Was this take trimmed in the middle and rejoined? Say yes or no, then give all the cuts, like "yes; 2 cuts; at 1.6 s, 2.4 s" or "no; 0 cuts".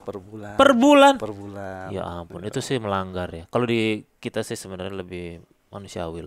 no; 0 cuts